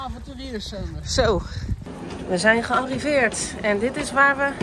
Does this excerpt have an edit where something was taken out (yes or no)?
yes